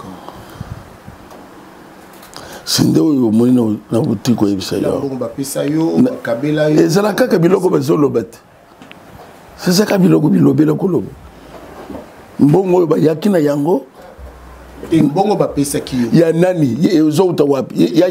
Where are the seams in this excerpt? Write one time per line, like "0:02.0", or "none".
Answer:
0:05.2